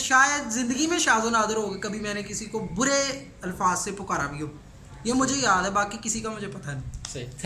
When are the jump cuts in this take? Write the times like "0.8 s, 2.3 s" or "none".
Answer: none